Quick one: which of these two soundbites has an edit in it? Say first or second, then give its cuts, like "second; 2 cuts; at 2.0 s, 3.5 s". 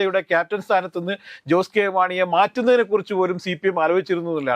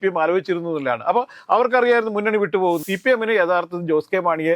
second; 1 cut; at 2.8 s